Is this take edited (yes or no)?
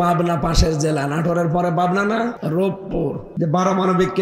yes